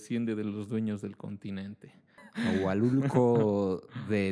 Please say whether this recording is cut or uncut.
cut